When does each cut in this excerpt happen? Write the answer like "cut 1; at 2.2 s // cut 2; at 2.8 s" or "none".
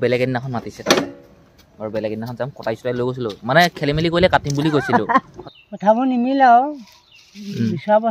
cut 1; at 5.4 s